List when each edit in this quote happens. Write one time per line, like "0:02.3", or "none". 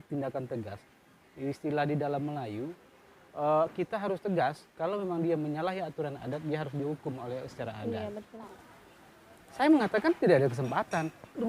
0:08.5